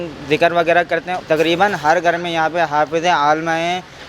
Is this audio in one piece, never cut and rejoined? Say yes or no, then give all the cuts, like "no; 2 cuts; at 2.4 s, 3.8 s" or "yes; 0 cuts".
no; 1 cut; at 1.2 s